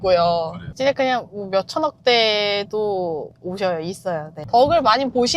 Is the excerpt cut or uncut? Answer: cut